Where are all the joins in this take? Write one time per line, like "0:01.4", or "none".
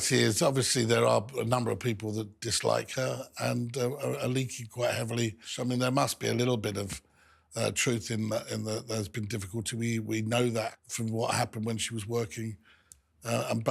0:05.5
0:10.7